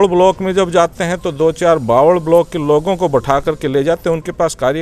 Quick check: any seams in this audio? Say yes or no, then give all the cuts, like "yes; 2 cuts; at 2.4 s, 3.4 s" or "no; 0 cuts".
no; 0 cuts